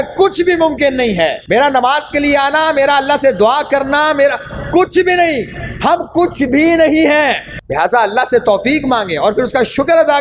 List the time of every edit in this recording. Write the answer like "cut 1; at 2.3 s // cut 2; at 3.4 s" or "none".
cut 1; at 1.4 s // cut 2; at 7.5 s